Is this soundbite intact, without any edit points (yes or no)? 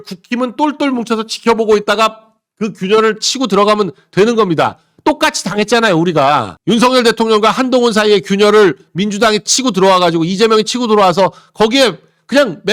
yes